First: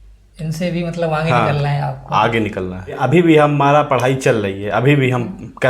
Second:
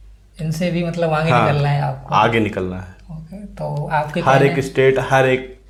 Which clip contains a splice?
first; 1 cut; at 3.0 s

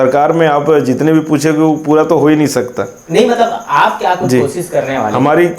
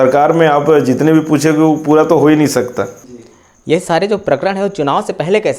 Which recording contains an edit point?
second; 1 cut; at 3.1 s

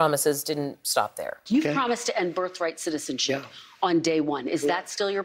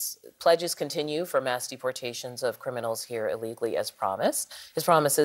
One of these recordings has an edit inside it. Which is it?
first; 1 cut; at 1.3 s

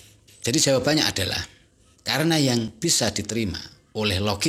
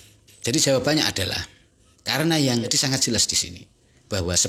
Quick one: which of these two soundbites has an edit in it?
second; 1 cut; at 2.8 s

